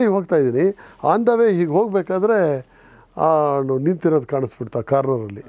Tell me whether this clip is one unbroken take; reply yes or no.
yes